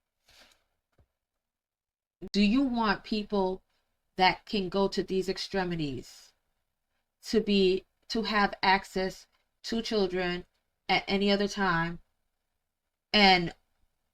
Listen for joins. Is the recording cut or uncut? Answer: cut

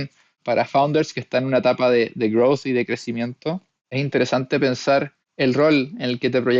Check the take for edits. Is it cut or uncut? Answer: cut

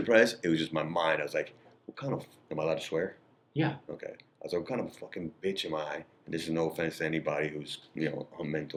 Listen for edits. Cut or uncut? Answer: uncut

